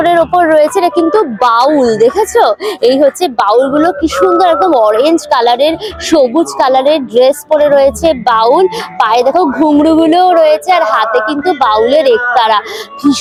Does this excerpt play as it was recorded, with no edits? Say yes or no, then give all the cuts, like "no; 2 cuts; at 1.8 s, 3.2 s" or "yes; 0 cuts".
yes; 0 cuts